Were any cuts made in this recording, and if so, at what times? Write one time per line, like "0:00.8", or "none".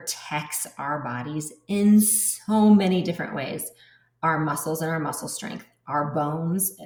none